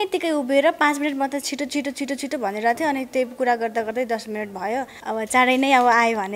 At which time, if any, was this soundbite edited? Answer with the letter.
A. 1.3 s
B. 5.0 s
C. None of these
B